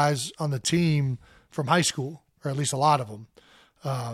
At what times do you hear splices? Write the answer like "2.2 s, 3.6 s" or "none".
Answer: none